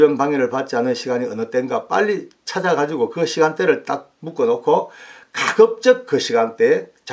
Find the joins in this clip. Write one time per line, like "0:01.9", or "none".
0:04.2